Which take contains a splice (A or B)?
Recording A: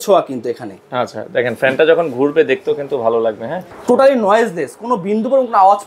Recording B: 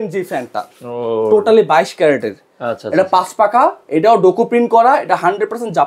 A